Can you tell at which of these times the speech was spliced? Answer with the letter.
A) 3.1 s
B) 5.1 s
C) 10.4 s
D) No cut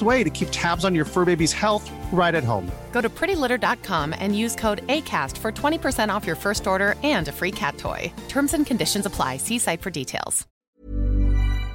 C